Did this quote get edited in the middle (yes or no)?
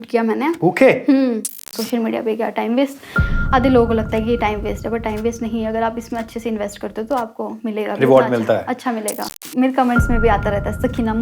yes